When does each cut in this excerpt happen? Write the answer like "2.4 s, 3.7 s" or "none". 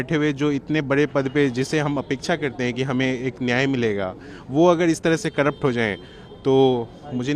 none

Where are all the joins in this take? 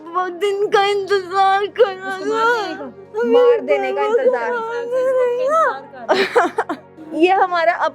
7.0 s

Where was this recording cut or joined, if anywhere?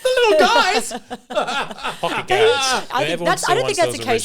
2.8 s

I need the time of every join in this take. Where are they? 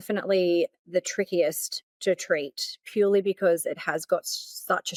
none

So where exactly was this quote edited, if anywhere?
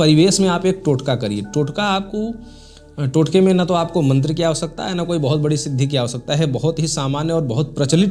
none

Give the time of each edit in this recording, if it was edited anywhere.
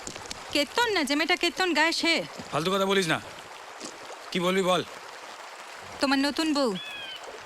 none

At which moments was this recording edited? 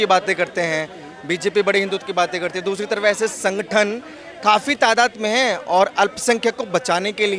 none

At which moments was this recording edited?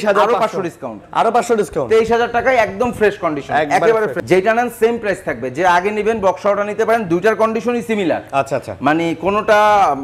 4.1 s

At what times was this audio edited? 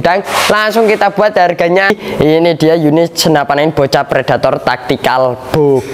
1.9 s

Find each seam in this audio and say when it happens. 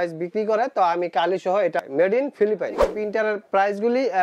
1.8 s, 3.0 s

